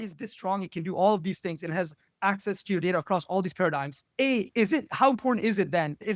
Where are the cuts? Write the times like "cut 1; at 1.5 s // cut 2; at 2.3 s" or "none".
cut 1; at 4.0 s